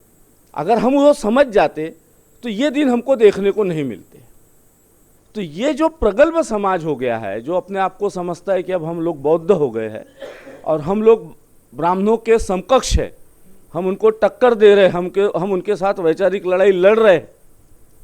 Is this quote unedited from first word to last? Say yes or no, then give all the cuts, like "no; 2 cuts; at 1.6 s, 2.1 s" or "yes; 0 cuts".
no; 1 cut; at 5.2 s